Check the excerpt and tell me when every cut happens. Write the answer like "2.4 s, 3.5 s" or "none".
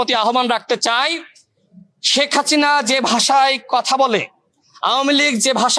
none